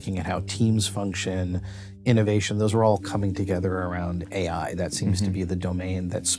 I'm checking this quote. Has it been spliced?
no; 0 cuts

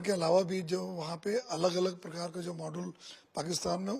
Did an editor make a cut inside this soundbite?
no; 0 cuts

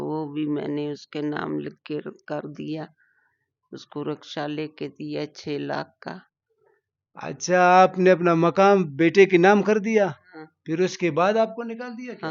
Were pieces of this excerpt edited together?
no; 0 cuts

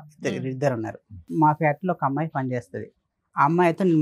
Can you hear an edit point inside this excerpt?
yes; 1 cut; at 1.3 s

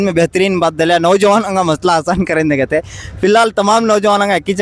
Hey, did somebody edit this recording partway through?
no; 0 cuts

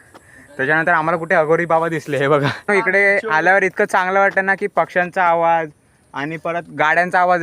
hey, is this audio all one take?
no; 1 cut; at 2.6 s

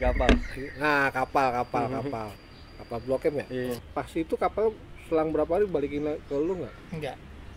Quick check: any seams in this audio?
yes; 1 cut; at 3.9 s

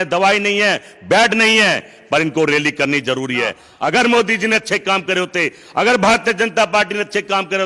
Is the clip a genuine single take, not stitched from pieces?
no; 1 cut; at 3.6 s

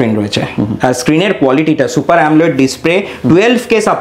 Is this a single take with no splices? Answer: yes; 0 cuts

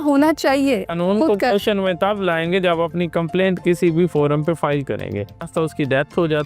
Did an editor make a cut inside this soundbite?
yes; 2 cuts; at 0.9 s, 5.5 s

